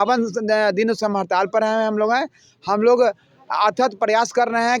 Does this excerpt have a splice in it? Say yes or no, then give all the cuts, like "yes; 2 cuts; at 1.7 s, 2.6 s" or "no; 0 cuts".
no; 0 cuts